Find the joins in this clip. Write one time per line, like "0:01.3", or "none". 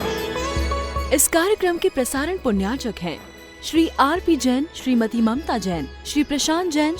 0:01.0